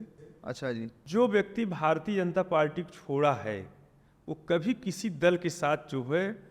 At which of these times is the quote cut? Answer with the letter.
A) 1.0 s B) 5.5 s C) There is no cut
A